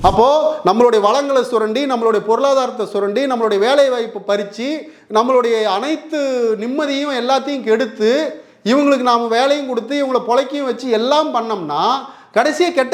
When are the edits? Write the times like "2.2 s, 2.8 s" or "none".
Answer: none